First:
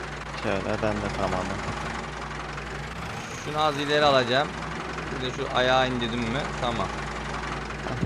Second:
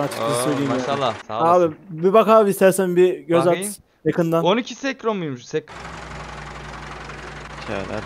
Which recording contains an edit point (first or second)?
second